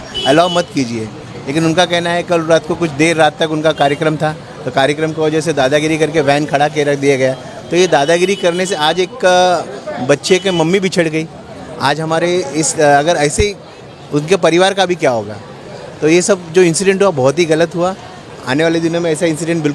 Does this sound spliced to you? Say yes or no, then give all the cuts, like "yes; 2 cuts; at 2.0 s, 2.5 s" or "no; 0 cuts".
no; 0 cuts